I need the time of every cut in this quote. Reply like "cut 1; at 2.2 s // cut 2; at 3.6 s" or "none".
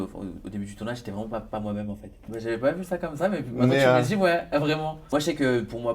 cut 1; at 2.3 s // cut 2; at 5.0 s